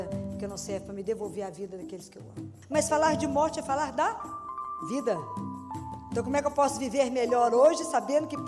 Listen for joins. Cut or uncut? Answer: cut